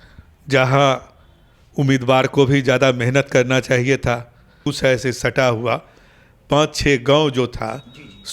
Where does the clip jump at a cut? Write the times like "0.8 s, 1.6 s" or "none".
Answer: 4.6 s